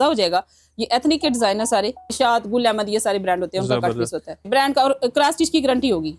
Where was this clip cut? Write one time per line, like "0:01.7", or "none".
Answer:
0:02.1
0:04.5